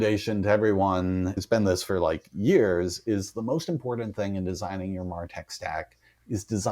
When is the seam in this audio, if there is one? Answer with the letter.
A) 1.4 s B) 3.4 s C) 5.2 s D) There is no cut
A